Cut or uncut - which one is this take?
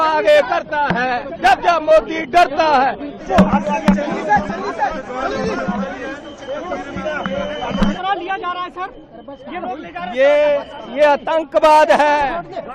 uncut